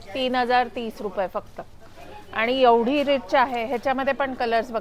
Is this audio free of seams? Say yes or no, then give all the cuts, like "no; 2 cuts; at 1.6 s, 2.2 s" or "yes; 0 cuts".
yes; 0 cuts